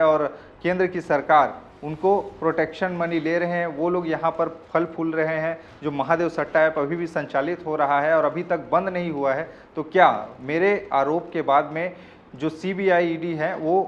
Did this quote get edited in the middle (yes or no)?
no